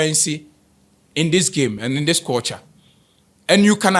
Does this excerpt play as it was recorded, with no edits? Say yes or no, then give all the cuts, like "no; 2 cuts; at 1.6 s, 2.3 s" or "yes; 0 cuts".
yes; 0 cuts